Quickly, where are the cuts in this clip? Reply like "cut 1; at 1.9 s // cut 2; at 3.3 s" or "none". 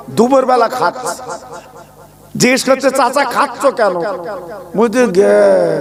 none

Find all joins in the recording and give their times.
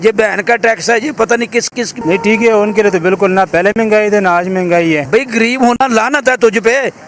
cut 1; at 2.0 s // cut 2; at 5.0 s

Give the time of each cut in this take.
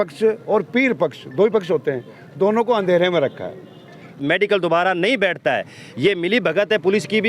cut 1; at 4.2 s

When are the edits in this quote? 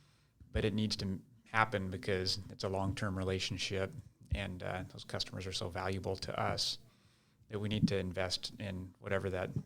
none

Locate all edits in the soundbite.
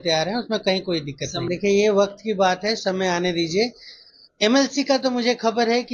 cut 1; at 1.3 s

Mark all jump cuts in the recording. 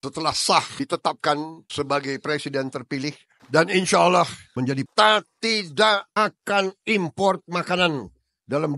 cut 1; at 3.3 s // cut 2; at 4.7 s

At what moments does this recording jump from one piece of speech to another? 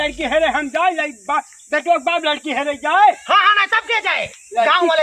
none

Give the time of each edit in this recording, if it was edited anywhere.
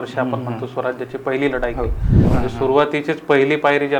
cut 1; at 2.3 s

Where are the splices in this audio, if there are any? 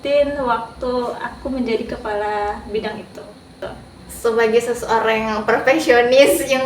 cut 1; at 3.6 s

